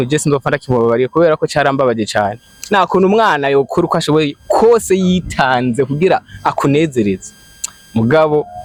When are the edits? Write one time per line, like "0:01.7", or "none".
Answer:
none